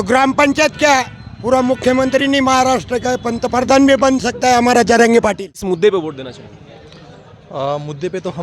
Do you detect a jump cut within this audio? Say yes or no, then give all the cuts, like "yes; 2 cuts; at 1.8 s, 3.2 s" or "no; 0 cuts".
yes; 1 cut; at 5.5 s